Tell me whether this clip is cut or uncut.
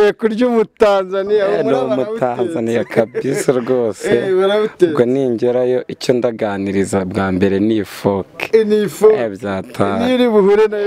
uncut